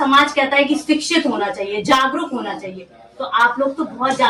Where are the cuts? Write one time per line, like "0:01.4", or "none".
none